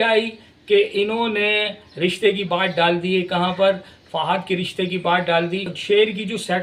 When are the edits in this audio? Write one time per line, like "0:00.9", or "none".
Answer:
none